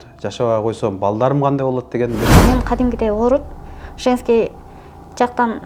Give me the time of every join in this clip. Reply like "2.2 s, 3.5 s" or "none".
2.3 s

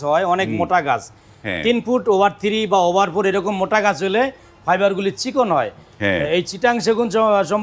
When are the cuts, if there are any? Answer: none

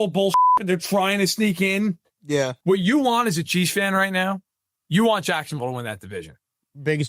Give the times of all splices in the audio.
2.6 s

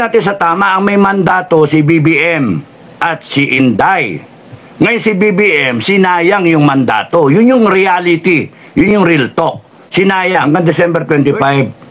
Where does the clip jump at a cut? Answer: 10.4 s

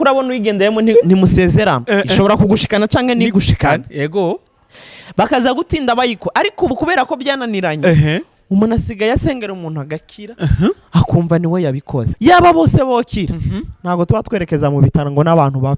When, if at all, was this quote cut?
12.0 s

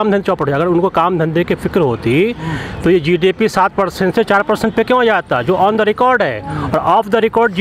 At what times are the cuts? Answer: none

